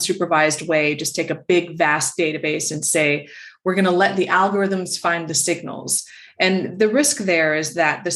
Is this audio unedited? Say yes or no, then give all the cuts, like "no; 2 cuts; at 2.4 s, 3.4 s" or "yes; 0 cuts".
yes; 0 cuts